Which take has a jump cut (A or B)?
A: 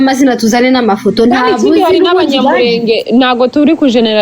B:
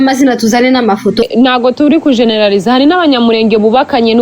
B